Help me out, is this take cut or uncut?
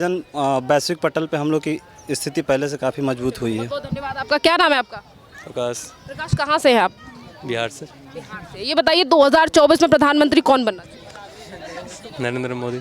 uncut